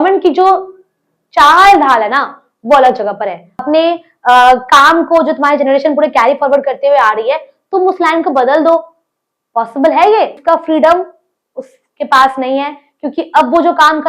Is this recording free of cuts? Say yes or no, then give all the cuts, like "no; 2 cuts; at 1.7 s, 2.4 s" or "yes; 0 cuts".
no; 2 cuts; at 3.7 s, 10.4 s